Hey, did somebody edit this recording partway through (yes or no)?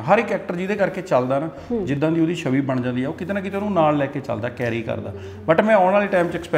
no